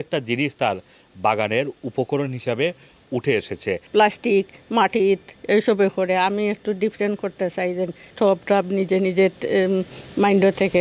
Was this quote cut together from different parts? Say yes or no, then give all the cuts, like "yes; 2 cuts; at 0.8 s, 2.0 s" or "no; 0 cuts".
yes; 2 cuts; at 3.8 s, 8.1 s